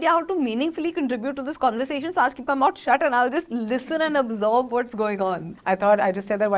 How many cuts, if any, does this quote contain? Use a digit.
1